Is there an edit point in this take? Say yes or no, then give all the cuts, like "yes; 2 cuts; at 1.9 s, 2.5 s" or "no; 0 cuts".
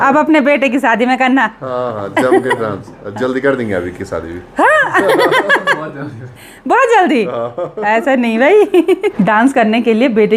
no; 0 cuts